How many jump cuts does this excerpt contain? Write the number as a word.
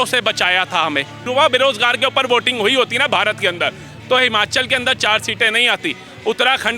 one